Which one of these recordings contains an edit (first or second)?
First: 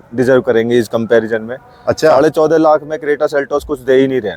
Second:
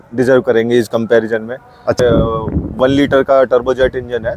second